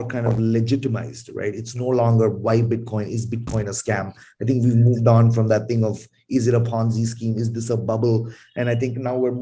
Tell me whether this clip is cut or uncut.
uncut